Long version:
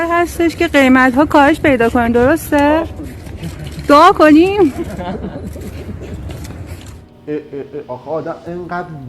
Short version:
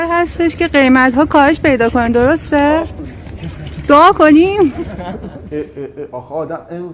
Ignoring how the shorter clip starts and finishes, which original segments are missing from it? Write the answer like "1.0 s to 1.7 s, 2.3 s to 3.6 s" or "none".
5.4 s to 7.2 s